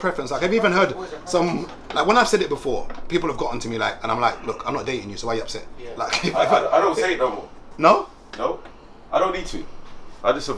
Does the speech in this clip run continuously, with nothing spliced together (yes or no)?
yes